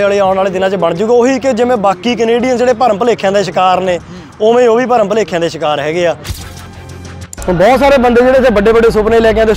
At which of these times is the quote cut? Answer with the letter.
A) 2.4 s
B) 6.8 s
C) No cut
B